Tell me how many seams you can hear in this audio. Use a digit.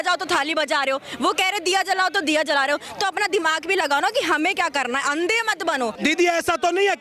1